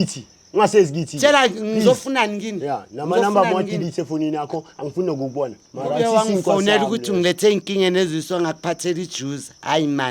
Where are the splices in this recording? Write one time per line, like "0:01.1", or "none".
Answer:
0:05.6